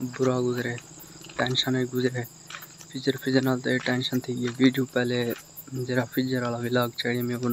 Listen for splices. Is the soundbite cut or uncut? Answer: uncut